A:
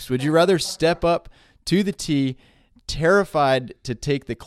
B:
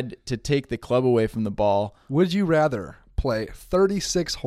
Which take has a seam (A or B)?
B